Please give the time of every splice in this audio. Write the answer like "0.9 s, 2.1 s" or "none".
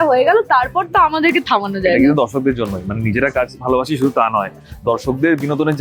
none